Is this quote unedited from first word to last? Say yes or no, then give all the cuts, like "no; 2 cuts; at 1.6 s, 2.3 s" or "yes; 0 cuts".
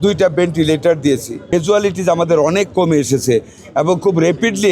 no; 1 cut; at 1.3 s